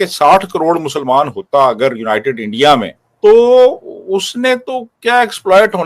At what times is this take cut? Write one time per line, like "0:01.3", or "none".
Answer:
0:03.0

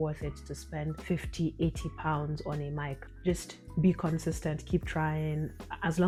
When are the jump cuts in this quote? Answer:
none

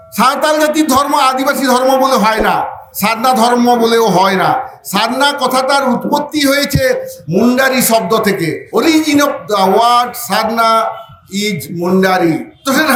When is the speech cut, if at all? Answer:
none

